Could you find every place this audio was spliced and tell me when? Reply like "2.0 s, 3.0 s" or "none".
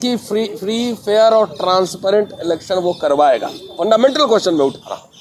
none